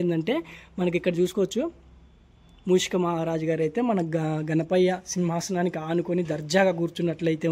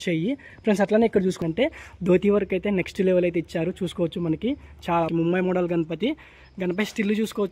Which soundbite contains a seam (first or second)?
second